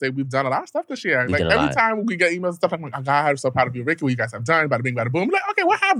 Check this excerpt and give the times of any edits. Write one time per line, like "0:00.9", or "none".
none